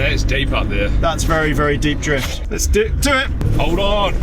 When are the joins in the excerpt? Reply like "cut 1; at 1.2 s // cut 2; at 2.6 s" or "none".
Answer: cut 1; at 2.4 s // cut 2; at 3.4 s